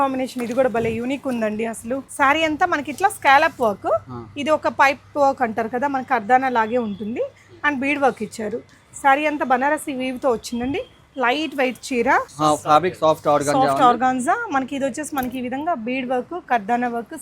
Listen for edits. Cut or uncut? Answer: cut